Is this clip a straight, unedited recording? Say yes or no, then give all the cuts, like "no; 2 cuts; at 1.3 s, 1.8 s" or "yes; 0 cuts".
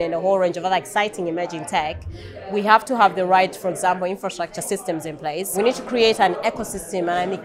no; 1 cut; at 5.6 s